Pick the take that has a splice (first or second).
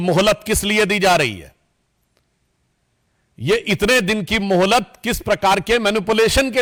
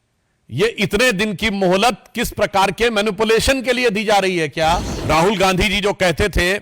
second